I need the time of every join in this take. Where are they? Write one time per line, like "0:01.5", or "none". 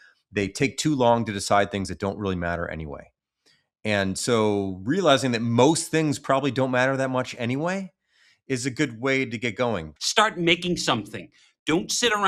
0:10.0